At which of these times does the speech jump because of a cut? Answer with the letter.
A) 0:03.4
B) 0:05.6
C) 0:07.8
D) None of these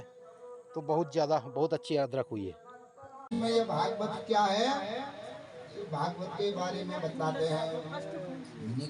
A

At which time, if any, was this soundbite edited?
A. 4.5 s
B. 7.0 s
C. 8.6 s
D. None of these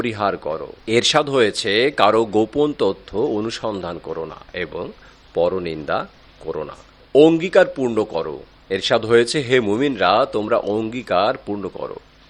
B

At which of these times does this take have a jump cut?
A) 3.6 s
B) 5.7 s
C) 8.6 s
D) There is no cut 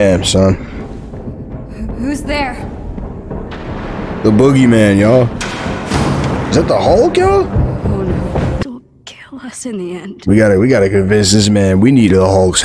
C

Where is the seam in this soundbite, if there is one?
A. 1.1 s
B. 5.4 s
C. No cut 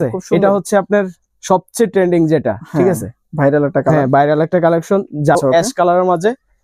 B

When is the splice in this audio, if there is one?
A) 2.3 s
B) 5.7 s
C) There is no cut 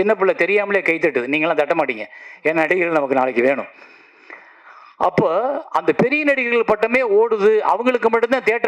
C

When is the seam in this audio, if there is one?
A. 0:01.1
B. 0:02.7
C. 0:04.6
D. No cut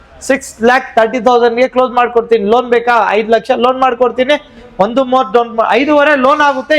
D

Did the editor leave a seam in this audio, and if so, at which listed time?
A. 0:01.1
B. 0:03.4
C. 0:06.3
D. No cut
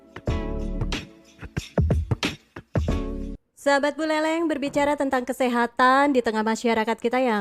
B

